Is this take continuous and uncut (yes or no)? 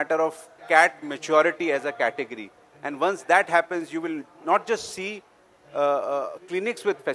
yes